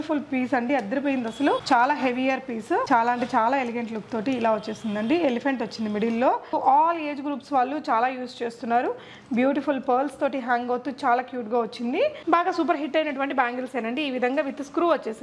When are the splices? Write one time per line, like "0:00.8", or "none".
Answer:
0:01.6
0:02.8
0:06.5
0:12.2